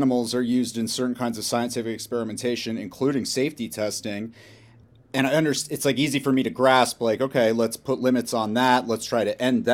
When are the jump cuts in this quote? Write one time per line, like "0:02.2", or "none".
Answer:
none